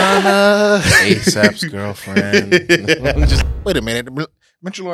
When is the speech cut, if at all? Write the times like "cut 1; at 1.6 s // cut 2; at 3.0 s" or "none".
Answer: cut 1; at 3.4 s

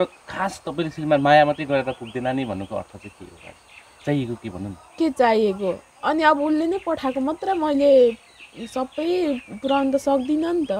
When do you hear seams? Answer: none

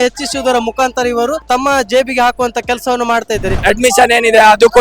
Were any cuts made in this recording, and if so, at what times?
cut 1; at 1.4 s // cut 2; at 3.6 s

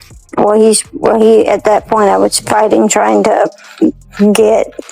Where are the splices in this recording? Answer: none

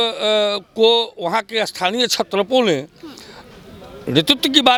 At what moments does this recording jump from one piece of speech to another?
none

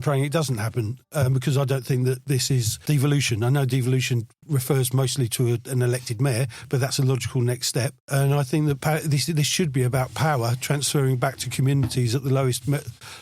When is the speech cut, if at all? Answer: cut 1; at 2.7 s

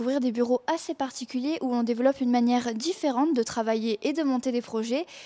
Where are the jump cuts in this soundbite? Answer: none

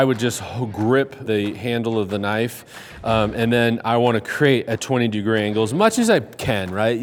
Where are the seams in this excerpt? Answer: none

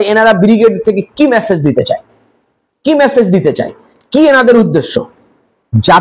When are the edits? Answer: none

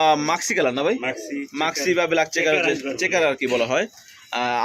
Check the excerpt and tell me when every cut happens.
none

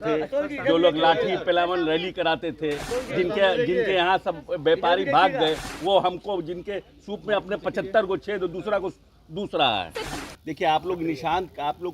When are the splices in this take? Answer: cut 1; at 10.1 s

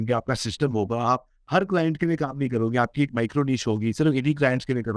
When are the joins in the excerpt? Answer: none

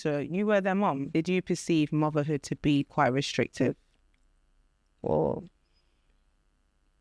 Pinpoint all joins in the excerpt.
cut 1; at 1.1 s

